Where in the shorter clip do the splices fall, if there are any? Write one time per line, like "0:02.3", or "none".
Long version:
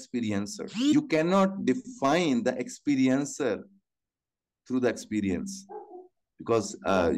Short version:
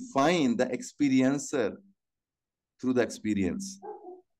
none